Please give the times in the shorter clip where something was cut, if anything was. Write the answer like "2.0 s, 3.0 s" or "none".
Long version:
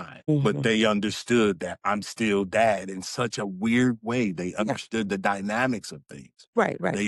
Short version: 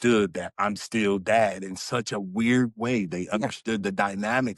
none